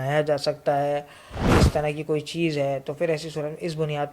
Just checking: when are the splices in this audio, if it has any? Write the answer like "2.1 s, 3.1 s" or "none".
1.5 s

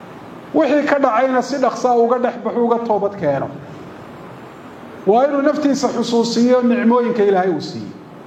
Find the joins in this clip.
none

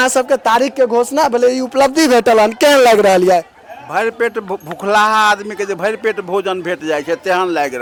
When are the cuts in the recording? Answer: none

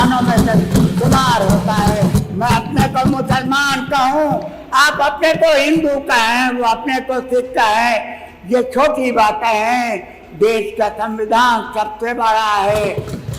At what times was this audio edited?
2.1 s

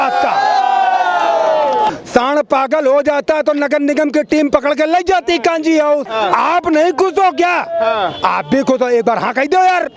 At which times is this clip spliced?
1.9 s, 6.1 s

